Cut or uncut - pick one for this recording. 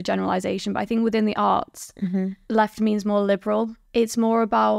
cut